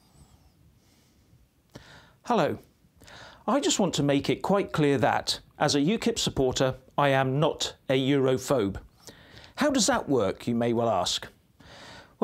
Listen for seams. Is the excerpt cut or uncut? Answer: uncut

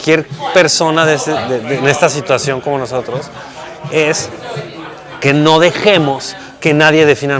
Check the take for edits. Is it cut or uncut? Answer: uncut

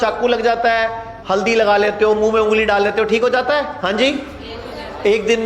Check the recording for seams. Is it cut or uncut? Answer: cut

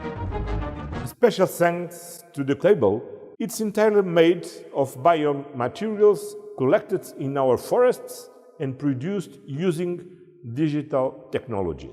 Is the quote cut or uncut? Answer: cut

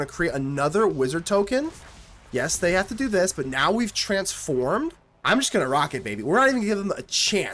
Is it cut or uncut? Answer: cut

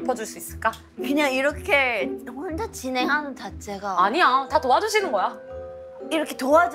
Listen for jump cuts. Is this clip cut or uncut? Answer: cut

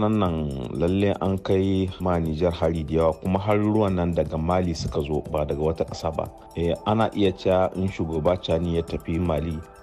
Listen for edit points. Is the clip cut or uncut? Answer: cut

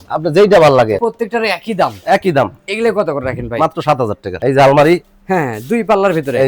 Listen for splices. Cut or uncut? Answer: cut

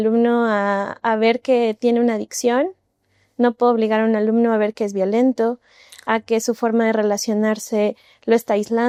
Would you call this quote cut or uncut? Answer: uncut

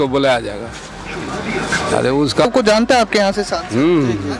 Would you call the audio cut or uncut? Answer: cut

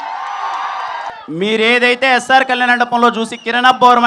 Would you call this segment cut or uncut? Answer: cut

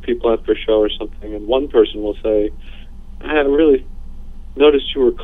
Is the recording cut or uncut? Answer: uncut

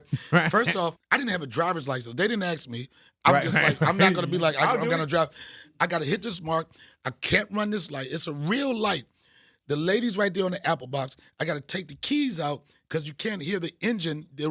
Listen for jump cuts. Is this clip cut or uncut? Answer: cut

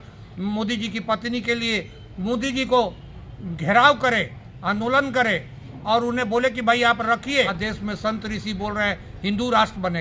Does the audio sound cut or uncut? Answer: cut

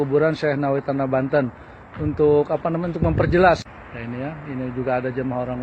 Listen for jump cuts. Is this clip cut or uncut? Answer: cut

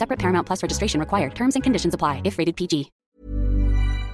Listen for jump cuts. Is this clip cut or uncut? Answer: cut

